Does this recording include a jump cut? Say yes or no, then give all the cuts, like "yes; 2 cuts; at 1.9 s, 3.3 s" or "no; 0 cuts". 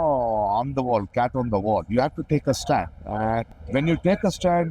yes; 1 cut; at 3.6 s